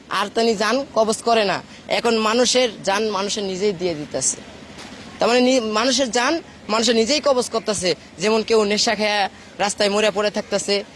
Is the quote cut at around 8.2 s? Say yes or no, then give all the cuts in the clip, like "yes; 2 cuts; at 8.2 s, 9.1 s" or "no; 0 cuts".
no; 0 cuts